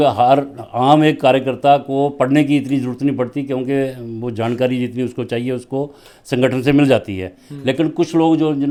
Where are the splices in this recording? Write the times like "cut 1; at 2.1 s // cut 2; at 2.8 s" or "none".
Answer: none